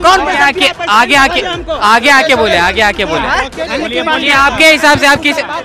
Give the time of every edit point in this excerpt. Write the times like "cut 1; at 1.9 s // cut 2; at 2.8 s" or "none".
none